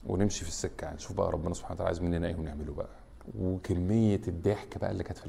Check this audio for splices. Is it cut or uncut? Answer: uncut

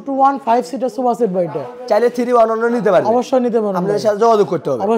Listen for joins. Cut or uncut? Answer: uncut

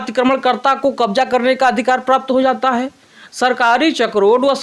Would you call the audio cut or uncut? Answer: uncut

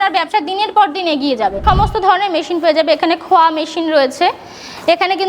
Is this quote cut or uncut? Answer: cut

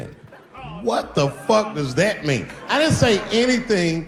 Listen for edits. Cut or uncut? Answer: uncut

